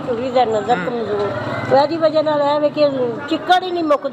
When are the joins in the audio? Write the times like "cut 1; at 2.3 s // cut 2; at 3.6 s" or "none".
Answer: none